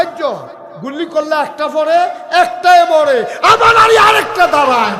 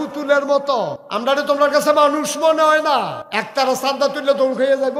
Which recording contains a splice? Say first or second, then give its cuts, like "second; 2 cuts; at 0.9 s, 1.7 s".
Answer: second; 2 cuts; at 1.0 s, 3.2 s